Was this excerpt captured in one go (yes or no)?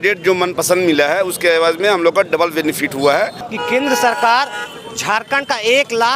no